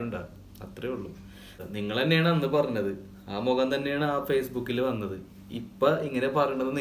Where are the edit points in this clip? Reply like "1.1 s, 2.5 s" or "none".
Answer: 1.6 s